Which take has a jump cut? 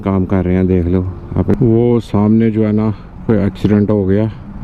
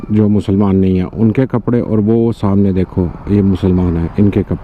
first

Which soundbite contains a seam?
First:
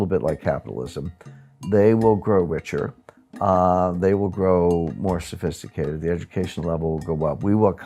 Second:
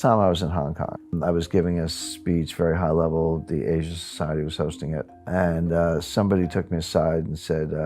second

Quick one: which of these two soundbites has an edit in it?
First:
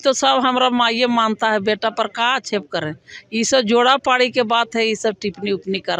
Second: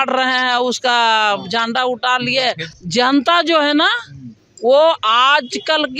second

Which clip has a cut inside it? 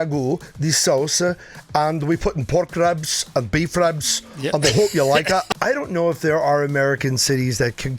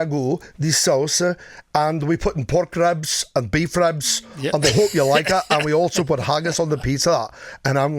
first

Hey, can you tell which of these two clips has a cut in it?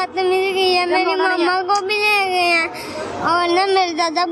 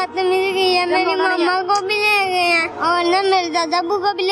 second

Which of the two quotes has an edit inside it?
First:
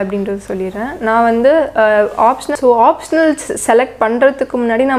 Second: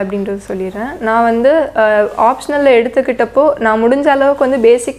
first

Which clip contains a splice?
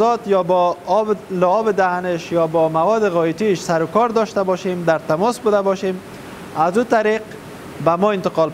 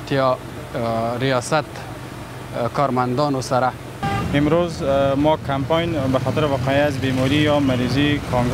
second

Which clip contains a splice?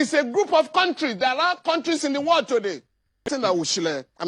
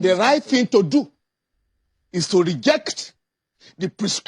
first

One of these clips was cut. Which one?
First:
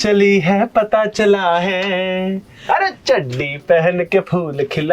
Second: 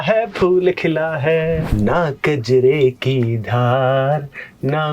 second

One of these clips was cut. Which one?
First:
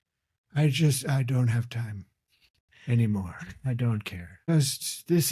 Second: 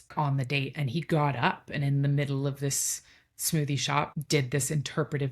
second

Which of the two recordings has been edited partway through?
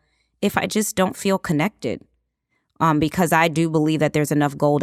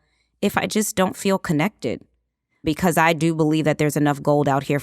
second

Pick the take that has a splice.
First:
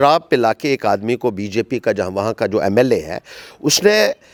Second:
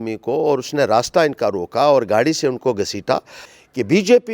second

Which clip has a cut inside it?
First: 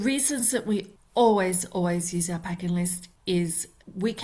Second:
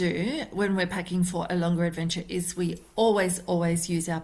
first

